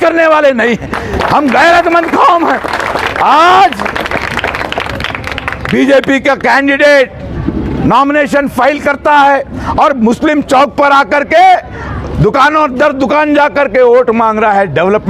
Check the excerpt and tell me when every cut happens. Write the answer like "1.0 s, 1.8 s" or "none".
none